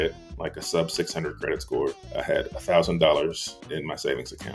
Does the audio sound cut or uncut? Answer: cut